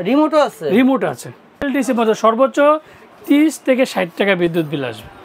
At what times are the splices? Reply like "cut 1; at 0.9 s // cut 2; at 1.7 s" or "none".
cut 1; at 1.6 s